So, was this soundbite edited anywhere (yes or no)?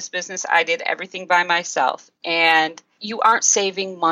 no